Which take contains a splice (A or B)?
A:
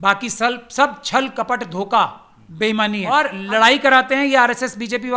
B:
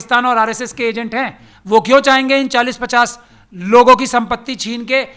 A